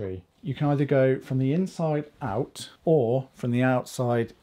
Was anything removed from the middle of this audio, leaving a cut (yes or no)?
yes